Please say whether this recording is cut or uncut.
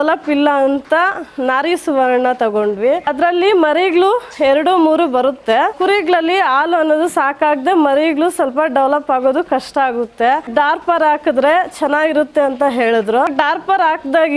cut